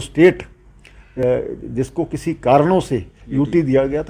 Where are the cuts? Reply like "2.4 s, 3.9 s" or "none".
1.2 s